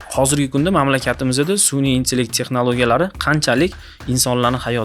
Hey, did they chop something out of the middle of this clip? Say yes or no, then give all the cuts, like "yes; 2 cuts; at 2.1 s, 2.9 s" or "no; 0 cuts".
no; 0 cuts